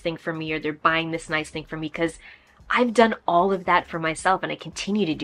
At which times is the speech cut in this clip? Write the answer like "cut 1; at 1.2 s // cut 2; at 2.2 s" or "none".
none